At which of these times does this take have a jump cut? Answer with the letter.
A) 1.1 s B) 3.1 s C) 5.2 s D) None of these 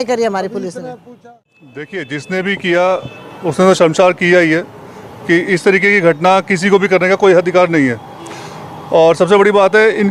A